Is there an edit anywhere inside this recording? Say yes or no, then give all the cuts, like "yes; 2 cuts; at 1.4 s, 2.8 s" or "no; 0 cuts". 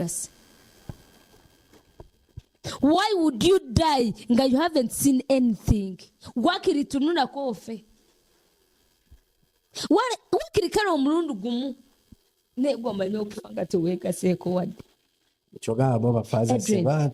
no; 0 cuts